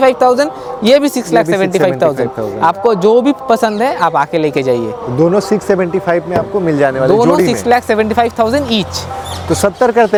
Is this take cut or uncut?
uncut